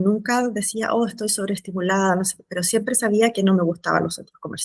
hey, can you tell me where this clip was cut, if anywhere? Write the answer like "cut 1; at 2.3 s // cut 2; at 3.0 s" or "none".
none